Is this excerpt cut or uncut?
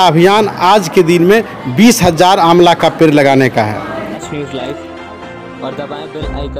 cut